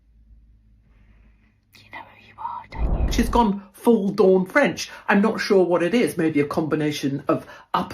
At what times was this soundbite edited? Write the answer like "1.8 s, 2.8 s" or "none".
3.1 s